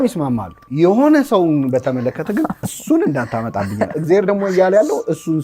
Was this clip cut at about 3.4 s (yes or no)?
no